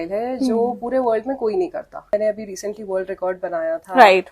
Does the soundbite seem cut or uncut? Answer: cut